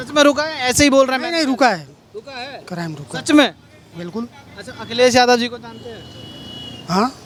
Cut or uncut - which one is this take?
uncut